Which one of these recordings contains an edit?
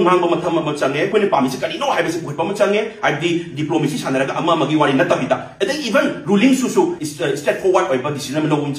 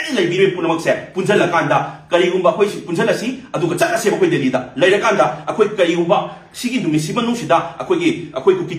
first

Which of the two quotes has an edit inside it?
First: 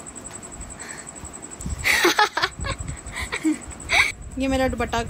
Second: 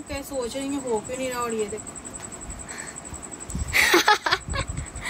first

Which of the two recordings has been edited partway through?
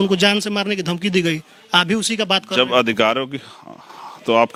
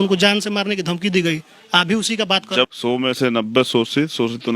second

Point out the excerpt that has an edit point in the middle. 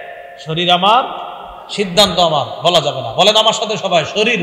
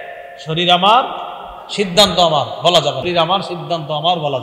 second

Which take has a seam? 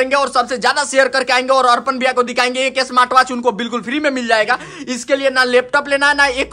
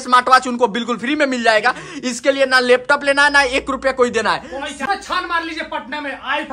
second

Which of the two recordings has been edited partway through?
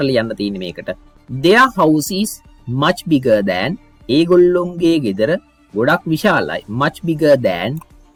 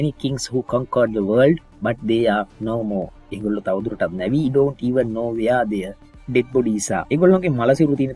second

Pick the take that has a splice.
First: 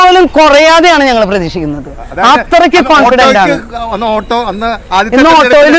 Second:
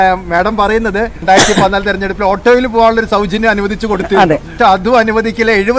second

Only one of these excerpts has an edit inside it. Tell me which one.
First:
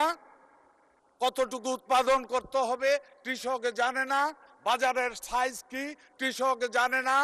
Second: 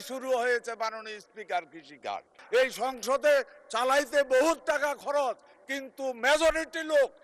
second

